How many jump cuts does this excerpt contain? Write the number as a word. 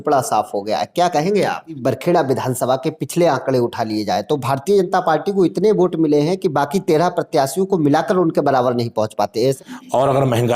two